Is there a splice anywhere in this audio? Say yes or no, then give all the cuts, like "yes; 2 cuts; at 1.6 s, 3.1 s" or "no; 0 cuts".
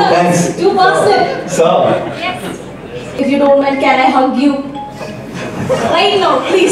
yes; 1 cut; at 3.1 s